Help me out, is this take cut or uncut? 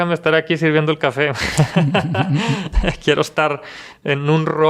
uncut